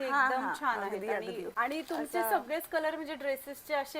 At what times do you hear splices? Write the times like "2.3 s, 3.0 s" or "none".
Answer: 1.4 s